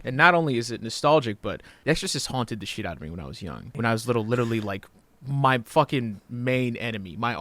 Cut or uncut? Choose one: cut